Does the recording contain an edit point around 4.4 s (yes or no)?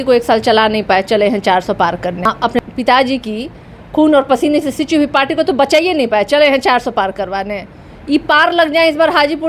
no